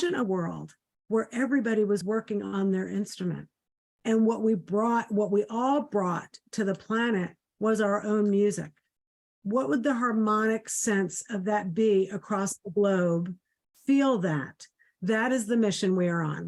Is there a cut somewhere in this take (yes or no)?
no